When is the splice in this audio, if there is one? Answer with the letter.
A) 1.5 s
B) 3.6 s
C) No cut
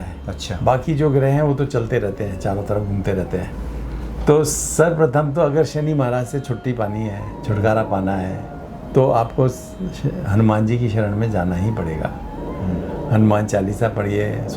B